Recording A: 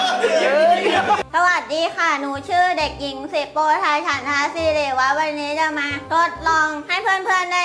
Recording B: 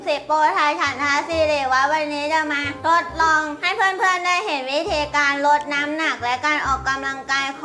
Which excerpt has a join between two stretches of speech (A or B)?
A